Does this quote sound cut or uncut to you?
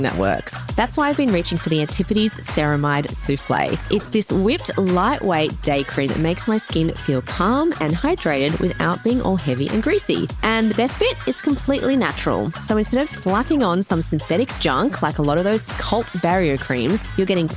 uncut